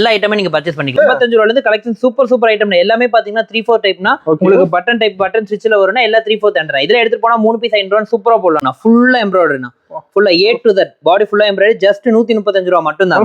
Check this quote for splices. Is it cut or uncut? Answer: cut